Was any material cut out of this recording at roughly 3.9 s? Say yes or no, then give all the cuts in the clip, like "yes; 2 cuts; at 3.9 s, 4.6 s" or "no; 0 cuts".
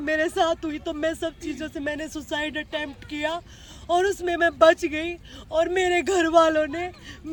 no; 0 cuts